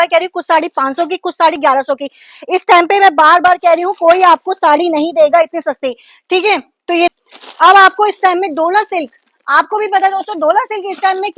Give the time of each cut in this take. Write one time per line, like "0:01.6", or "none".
0:07.1